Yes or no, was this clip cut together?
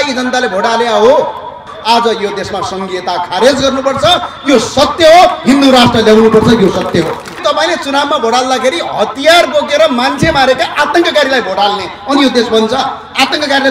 yes